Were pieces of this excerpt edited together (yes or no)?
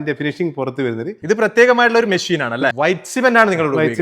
yes